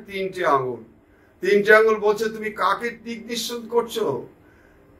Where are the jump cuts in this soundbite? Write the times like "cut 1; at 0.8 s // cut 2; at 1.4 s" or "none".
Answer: none